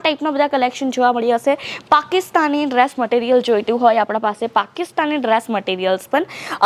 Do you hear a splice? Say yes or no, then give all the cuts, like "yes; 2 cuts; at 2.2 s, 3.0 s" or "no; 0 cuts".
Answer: no; 0 cuts